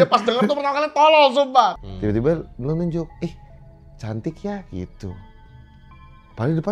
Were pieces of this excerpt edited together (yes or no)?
yes